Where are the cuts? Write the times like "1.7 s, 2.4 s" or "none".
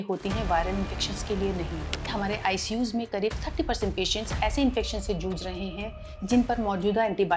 2.1 s